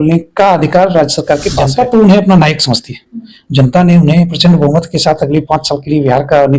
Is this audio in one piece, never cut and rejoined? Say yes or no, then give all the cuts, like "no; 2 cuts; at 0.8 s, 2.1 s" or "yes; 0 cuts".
no; 1 cut; at 1.6 s